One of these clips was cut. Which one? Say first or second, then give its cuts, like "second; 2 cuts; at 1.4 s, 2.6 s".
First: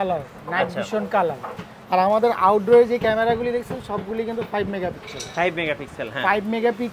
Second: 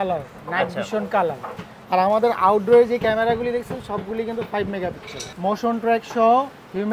second; 1 cut; at 5.2 s